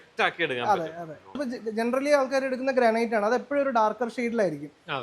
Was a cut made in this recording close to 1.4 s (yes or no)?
yes